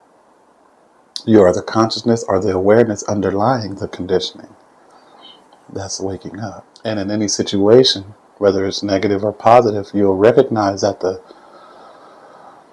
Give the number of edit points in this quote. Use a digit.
1